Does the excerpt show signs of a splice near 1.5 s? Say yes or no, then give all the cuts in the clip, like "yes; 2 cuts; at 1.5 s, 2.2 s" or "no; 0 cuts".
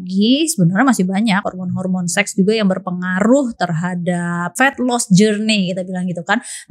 yes; 2 cuts; at 1.5 s, 4.6 s